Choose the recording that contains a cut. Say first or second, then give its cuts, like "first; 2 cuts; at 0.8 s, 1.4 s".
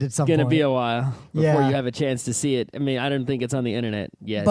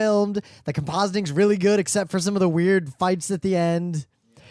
first; 1 cut; at 1.2 s